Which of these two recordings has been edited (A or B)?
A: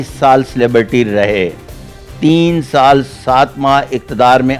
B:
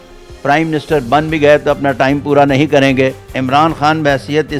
B